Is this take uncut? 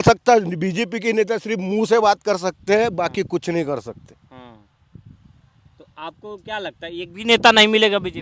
yes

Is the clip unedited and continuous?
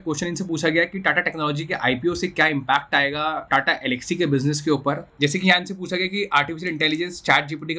no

